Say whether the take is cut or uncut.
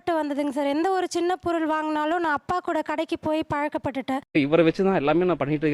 uncut